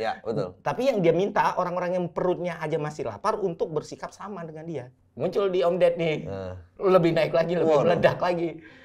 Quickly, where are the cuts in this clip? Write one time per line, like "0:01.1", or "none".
0:04.9